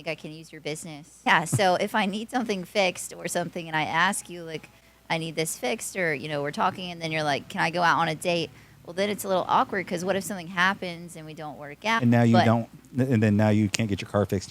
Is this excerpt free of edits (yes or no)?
no